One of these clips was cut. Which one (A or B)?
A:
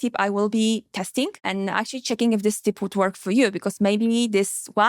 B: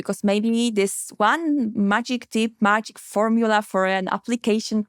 A